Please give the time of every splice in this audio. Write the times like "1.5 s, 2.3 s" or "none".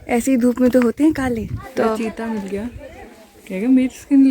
1.6 s